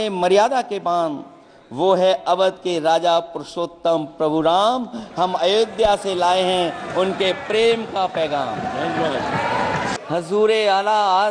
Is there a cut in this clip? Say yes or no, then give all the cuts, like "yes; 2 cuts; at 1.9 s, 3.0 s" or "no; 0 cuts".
yes; 1 cut; at 10.0 s